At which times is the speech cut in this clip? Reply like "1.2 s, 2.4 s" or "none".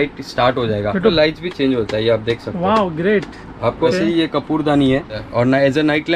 1.1 s, 3.9 s, 5.2 s

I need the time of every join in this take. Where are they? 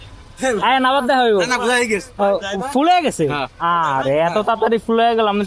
none

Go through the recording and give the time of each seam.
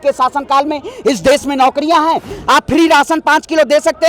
2.3 s

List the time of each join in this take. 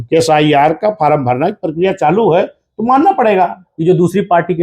3.6 s

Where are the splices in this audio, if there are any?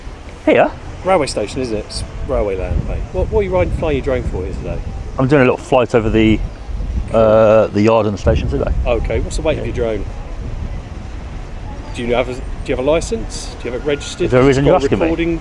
none

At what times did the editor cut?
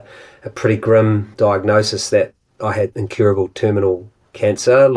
1.3 s, 3.0 s

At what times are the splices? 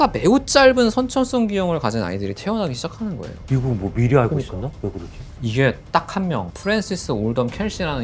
3.4 s

